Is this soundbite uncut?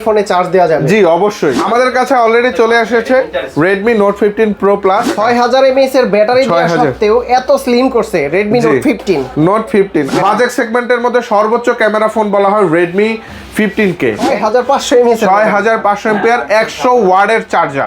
no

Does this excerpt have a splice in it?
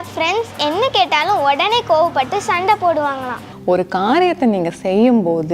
yes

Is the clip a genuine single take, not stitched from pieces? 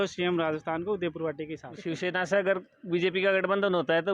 no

